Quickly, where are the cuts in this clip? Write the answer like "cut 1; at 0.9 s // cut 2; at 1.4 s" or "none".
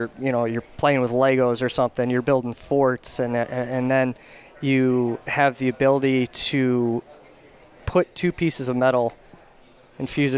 none